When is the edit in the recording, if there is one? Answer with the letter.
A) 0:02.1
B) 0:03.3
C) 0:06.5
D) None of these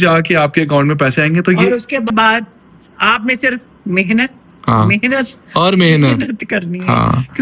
A